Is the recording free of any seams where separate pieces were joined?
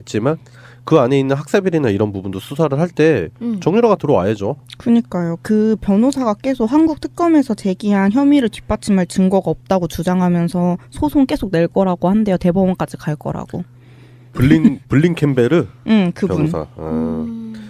no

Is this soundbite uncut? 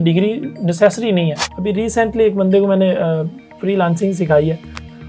no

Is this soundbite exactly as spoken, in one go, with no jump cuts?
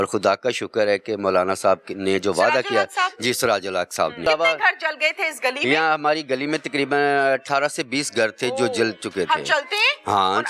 no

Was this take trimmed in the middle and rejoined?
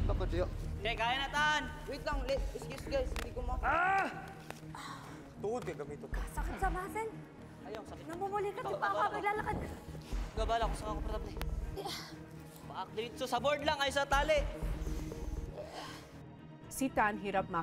no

